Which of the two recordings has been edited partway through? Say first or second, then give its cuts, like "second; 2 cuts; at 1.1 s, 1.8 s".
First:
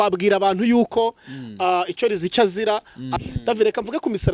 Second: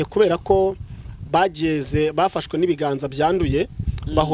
first; 1 cut; at 3.1 s